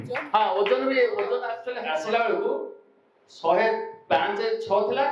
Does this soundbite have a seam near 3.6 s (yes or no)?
no